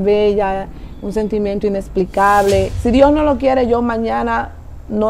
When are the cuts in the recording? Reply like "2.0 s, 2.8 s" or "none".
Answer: 2.7 s